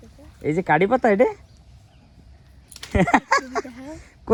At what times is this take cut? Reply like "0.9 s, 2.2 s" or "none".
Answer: none